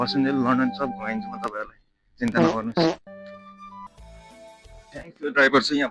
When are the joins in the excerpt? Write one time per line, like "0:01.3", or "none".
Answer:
0:03.9

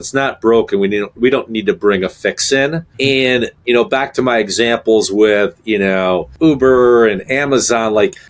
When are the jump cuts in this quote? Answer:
none

